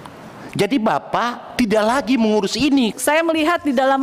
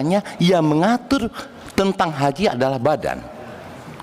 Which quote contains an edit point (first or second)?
first